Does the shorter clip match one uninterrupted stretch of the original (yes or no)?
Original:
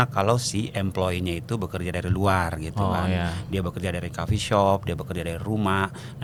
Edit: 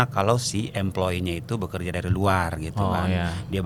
yes